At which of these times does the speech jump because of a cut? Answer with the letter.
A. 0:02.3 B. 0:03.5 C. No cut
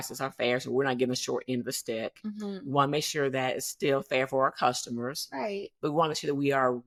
C